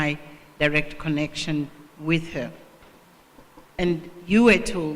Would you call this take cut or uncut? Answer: cut